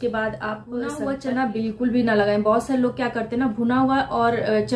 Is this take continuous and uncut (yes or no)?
no